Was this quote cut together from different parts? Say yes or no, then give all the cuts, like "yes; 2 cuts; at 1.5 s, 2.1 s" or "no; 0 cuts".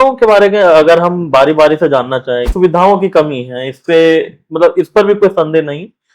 yes; 1 cut; at 2.5 s